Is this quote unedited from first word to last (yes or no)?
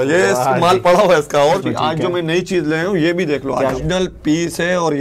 no